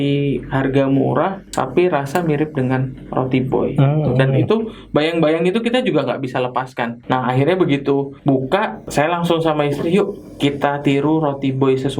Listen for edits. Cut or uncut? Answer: cut